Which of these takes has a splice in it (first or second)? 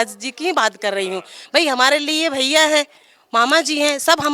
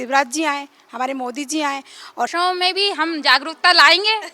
second